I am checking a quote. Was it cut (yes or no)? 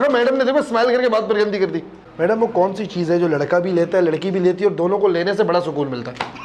yes